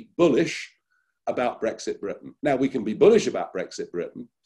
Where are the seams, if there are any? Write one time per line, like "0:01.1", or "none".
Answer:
0:02.3